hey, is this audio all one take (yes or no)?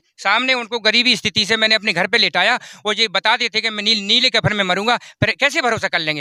yes